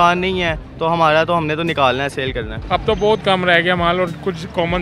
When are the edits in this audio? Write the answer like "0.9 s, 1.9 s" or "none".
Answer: 2.5 s